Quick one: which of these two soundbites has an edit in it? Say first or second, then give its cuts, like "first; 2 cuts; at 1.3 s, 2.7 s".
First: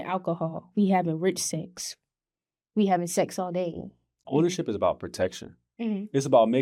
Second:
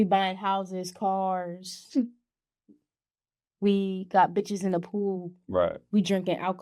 first; 1 cut; at 4.2 s